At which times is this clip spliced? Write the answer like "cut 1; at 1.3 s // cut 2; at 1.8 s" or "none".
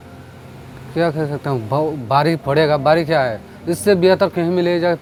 none